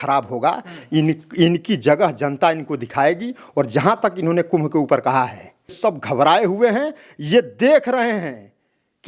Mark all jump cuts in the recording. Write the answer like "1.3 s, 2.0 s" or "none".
5.8 s